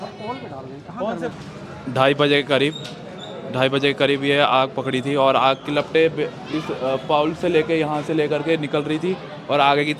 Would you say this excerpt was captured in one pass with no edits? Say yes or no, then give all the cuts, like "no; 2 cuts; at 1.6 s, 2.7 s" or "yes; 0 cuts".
no; 1 cut; at 1.3 s